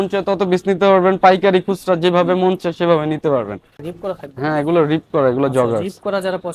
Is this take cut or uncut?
cut